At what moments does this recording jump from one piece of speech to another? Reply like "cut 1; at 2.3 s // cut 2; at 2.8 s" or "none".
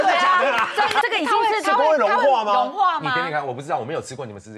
cut 1; at 1.0 s

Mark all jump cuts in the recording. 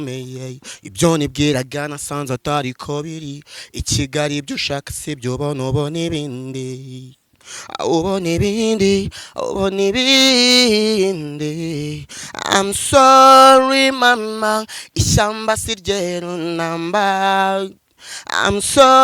none

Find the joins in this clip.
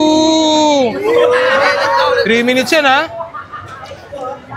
cut 1; at 1.2 s

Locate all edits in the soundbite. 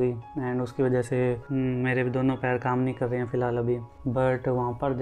cut 1; at 1.4 s // cut 2; at 3.9 s

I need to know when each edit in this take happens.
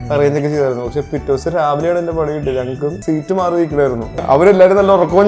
cut 1; at 3.0 s // cut 2; at 4.1 s

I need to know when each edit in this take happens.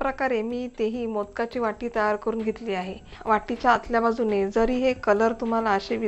cut 1; at 3.4 s

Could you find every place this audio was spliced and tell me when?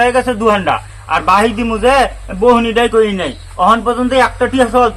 none

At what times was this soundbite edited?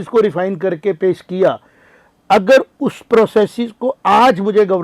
none

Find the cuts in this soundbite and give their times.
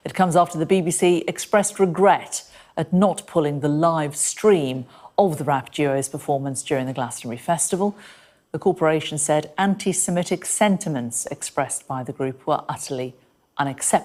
none

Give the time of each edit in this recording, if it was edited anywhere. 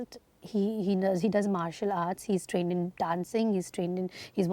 none

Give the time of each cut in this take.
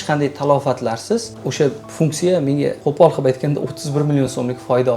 cut 1; at 1.4 s // cut 2; at 2.8 s

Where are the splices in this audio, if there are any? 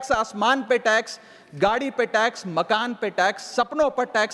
none

